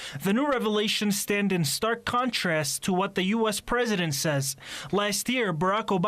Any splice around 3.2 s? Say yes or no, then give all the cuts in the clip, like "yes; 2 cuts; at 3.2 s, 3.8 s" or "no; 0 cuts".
no; 1 cut; at 5.0 s